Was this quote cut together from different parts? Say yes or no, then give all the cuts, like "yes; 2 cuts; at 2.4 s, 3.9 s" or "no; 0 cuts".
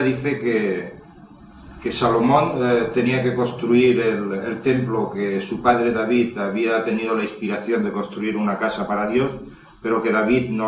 yes; 1 cut; at 3.8 s